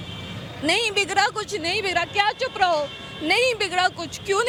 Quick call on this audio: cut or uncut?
uncut